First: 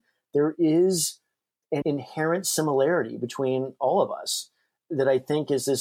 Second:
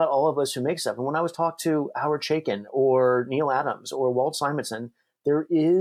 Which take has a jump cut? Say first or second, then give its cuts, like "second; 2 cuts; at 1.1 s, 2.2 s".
first; 2 cuts; at 1.8 s, 4.7 s